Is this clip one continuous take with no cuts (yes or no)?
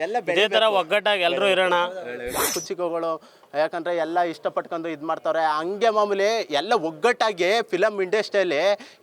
no